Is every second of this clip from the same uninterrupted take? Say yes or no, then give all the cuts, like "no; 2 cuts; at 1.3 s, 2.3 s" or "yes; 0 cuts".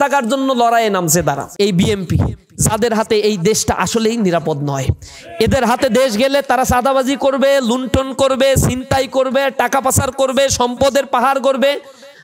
no; 1 cut; at 1.5 s